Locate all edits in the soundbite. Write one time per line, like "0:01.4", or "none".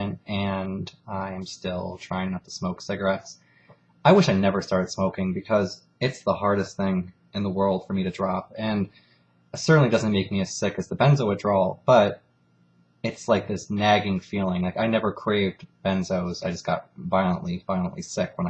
0:15.2